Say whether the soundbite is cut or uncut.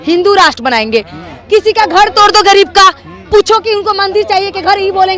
uncut